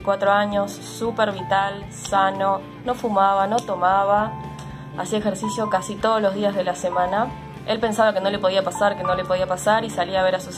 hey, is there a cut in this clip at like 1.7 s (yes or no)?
no